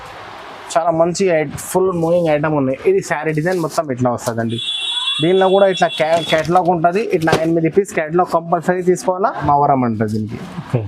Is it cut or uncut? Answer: cut